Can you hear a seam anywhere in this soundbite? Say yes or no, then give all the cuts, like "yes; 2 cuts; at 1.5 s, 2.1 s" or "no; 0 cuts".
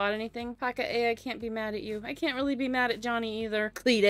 no; 0 cuts